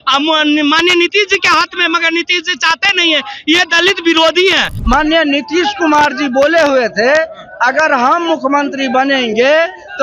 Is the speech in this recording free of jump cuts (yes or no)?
no